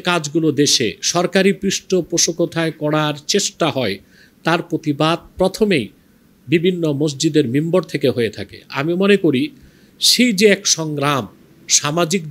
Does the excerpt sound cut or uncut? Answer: uncut